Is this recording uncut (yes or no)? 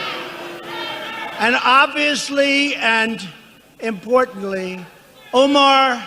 no